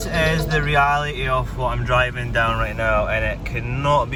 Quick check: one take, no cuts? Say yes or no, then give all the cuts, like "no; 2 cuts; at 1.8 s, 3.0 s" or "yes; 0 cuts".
yes; 0 cuts